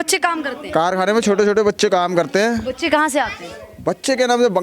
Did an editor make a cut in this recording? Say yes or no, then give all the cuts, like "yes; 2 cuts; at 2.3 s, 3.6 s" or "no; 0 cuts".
no; 0 cuts